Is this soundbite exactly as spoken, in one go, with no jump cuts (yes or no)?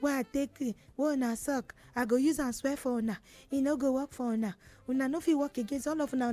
yes